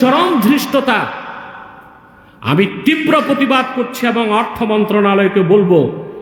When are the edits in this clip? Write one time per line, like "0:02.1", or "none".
none